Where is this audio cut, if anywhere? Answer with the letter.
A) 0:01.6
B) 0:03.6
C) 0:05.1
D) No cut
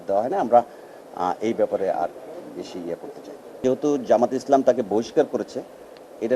B